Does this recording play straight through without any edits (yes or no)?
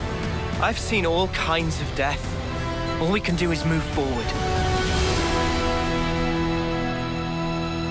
yes